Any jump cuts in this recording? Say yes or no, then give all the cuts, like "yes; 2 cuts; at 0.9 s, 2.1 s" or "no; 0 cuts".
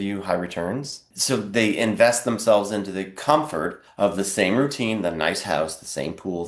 yes; 2 cuts; at 1.1 s, 3.8 s